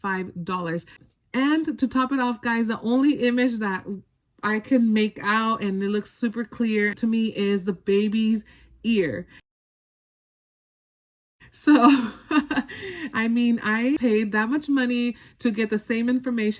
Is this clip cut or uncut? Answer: uncut